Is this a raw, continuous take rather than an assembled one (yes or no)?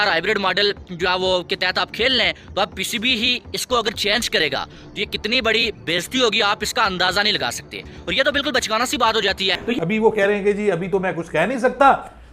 yes